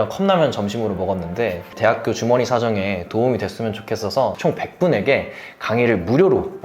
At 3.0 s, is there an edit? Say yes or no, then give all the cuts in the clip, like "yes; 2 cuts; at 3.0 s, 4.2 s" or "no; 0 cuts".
no; 1 cut; at 4.4 s